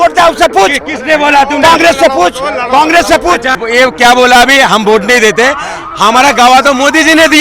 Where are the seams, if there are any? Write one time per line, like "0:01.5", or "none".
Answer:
0:03.6